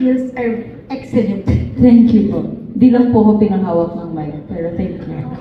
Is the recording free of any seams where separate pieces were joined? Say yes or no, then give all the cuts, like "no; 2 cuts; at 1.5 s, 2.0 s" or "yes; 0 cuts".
yes; 0 cuts